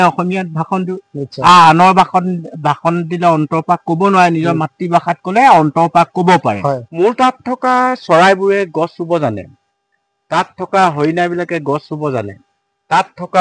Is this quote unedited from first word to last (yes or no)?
no